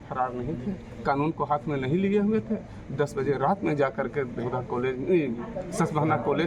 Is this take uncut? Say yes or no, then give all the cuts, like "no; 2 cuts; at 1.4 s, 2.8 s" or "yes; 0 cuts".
yes; 0 cuts